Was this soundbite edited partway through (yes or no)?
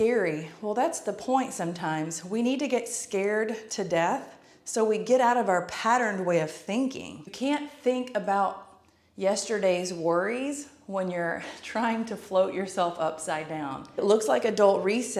yes